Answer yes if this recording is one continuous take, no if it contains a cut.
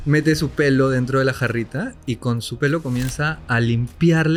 yes